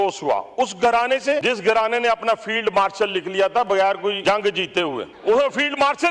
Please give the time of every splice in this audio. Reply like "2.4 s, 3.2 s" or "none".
1.4 s, 4.2 s, 5.1 s